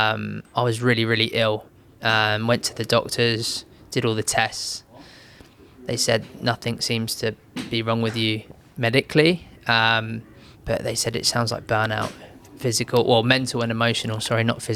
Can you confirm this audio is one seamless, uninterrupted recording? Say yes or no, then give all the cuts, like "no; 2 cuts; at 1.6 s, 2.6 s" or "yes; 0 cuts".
yes; 0 cuts